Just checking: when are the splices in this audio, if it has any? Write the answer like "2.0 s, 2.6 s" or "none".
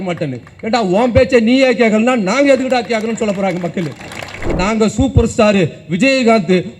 4.5 s